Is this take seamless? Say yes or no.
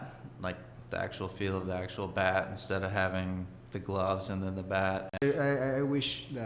no